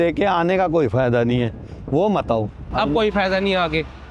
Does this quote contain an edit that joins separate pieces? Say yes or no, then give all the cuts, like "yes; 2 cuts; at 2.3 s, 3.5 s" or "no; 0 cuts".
no; 0 cuts